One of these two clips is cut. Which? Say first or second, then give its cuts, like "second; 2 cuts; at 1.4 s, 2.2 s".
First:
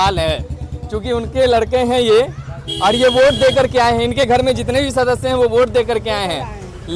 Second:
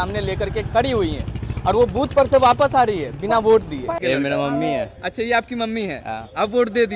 second; 1 cut; at 4.0 s